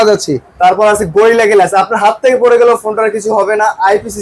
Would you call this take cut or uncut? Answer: uncut